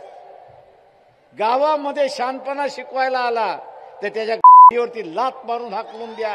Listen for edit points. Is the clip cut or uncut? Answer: uncut